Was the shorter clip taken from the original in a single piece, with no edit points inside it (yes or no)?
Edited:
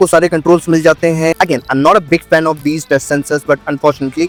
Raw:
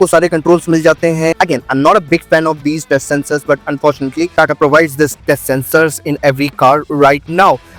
yes